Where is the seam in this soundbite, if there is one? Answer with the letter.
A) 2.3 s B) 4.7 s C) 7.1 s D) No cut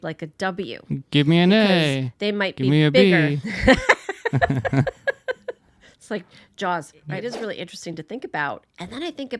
C